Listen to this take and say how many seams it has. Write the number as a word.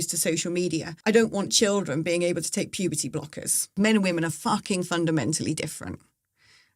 two